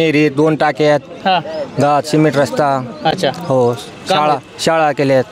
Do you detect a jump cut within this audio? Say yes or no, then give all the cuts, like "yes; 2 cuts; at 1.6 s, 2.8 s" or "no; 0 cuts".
no; 0 cuts